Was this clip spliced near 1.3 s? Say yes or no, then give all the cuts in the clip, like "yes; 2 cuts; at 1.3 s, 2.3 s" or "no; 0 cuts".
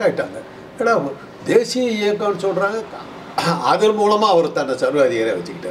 no; 1 cut; at 2.8 s